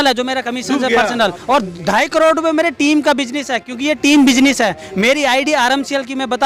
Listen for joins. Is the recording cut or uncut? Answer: uncut